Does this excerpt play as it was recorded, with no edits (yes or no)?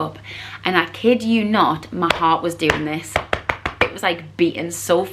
yes